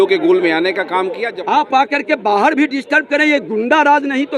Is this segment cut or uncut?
cut